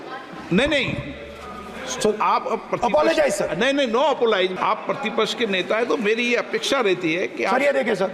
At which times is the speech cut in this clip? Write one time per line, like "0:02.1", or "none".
0:04.5